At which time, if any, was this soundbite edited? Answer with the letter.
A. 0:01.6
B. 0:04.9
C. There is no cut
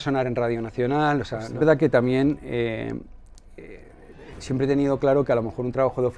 A